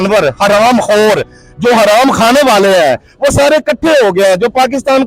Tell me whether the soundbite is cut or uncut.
uncut